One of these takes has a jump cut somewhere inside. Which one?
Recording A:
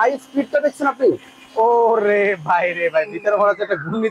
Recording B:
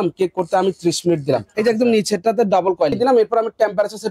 B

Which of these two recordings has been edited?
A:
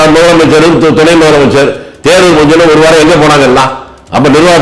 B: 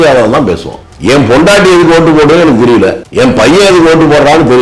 B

